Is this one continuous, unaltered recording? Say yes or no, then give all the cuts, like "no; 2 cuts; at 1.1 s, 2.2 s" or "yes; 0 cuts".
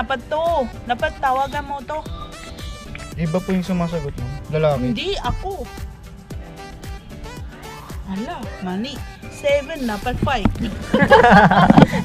yes; 0 cuts